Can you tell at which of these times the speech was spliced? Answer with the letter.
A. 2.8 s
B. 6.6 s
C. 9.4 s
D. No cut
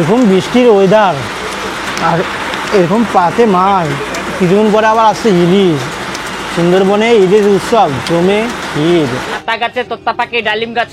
C